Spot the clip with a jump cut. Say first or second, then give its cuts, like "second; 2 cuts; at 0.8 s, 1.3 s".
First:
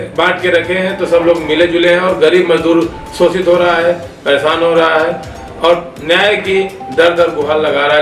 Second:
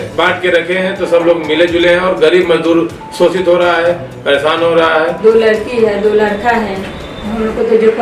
second; 1 cut; at 5.2 s